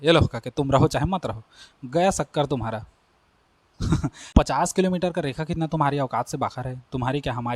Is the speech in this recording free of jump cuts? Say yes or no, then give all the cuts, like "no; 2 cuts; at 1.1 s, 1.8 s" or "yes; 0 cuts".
no; 1 cut; at 4.3 s